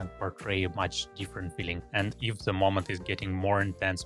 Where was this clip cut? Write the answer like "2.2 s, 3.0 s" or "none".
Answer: 1.8 s

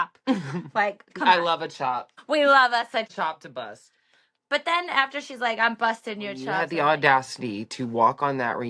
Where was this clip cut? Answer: 2.1 s, 3.1 s, 6.6 s

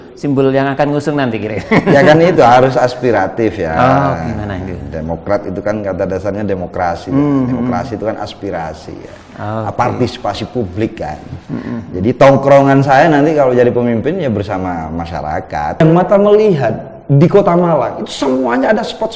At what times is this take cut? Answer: 15.8 s

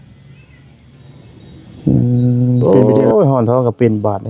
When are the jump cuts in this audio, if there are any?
2.6 s

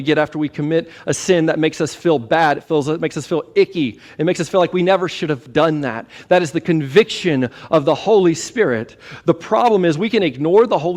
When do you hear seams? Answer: none

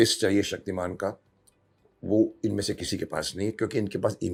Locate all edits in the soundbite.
none

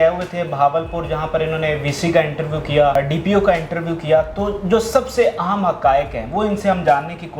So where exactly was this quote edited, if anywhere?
3.0 s

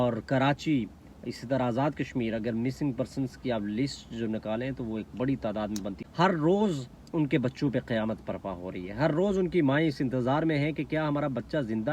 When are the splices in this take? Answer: 6.0 s

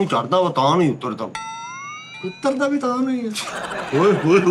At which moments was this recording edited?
none

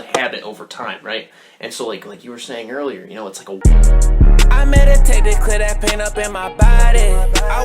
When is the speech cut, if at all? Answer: 3.6 s

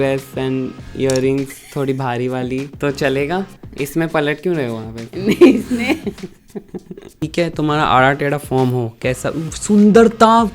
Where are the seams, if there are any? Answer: 7.2 s

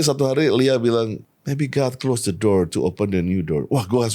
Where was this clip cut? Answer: 1.3 s

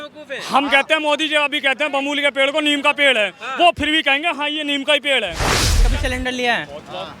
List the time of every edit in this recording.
5.7 s

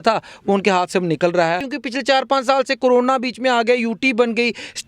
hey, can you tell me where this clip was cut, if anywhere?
1.7 s

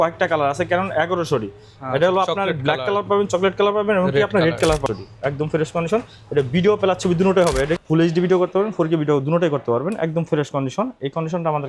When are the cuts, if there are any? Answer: 4.8 s, 7.8 s

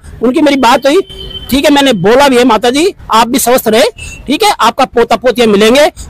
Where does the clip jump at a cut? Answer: none

